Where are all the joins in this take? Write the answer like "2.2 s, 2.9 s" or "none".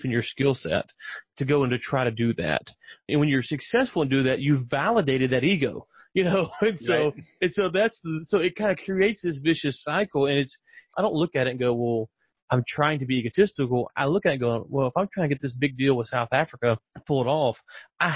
16.9 s